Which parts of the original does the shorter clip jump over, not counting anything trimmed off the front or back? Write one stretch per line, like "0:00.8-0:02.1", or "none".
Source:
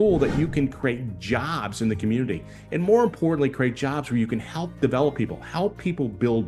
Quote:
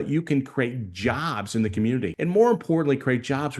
0:02.4-0:02.7